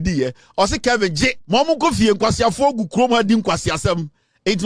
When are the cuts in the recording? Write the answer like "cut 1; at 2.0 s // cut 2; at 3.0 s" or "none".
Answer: cut 1; at 1.4 s